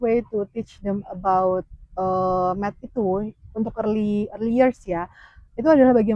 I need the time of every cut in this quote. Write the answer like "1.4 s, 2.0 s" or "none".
none